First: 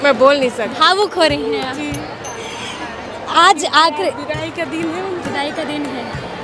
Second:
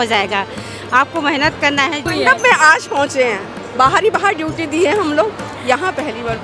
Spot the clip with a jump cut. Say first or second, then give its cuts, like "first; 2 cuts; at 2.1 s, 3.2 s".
second; 1 cut; at 2.1 s